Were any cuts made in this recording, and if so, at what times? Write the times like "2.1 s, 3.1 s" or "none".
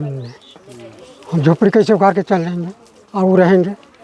none